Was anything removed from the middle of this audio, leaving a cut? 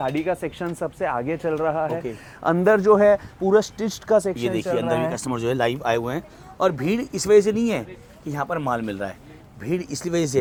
no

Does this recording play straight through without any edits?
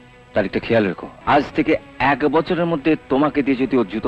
no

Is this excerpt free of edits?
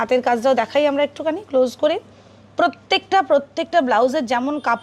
yes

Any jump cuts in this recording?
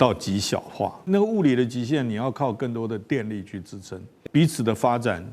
yes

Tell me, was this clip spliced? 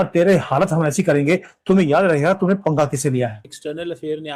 yes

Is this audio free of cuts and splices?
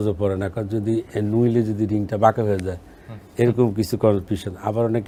yes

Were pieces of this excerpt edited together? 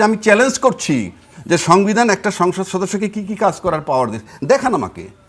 no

